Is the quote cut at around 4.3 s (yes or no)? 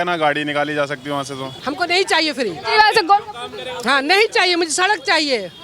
no